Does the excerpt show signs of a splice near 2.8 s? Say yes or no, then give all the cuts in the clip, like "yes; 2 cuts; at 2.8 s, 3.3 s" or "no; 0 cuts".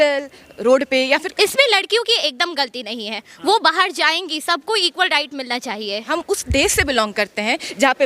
no; 2 cuts; at 1.3 s, 6.1 s